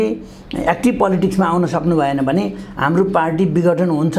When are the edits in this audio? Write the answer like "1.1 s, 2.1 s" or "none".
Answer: none